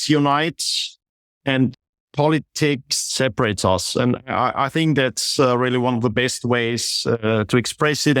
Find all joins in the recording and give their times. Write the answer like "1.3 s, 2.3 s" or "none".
1.8 s, 2.9 s